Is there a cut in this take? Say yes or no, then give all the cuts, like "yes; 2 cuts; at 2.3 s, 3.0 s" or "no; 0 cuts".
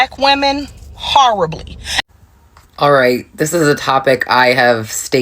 yes; 1 cut; at 2.1 s